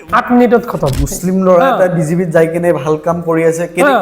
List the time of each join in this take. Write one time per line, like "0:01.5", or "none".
0:00.9